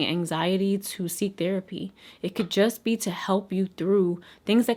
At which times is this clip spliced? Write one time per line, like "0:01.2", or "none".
none